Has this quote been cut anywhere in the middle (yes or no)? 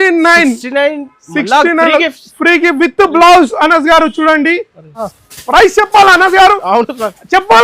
yes